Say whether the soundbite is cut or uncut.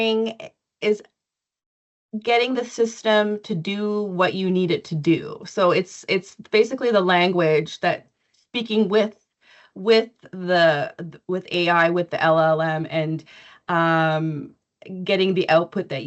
uncut